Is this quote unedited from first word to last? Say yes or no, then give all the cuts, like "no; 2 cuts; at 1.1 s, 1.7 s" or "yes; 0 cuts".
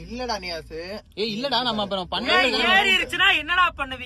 yes; 0 cuts